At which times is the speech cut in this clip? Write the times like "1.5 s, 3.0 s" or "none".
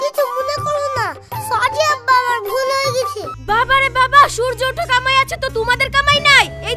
3.3 s